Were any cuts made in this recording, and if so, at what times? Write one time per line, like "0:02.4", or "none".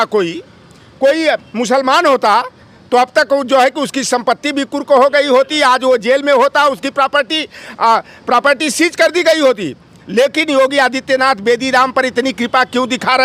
none